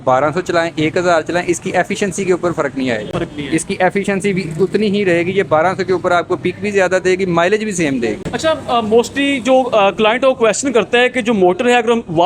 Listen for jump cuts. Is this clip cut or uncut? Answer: uncut